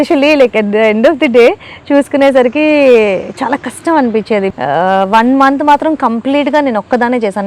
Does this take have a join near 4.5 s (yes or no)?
yes